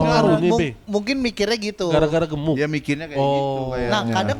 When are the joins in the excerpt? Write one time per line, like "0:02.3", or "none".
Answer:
none